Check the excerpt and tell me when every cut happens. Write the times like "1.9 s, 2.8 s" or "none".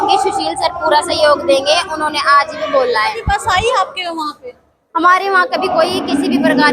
3.2 s

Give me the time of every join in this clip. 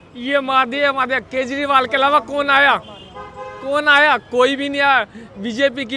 none

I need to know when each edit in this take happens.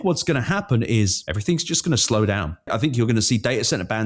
1.3 s, 2.7 s

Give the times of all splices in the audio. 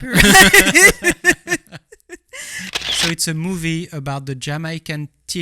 2.8 s

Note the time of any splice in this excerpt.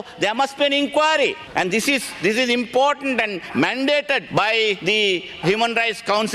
1.4 s, 4.6 s

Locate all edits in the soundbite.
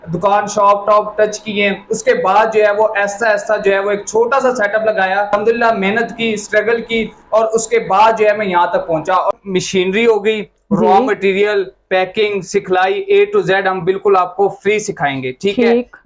5.3 s, 9.3 s

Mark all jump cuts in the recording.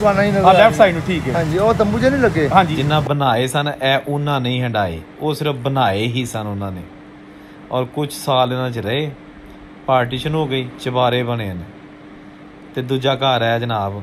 2.8 s, 10.7 s

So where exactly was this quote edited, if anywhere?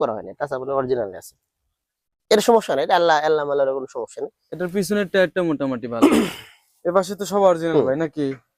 none

